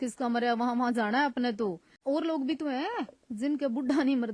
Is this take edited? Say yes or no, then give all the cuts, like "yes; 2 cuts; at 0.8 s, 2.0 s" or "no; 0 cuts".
yes; 1 cut; at 1.9 s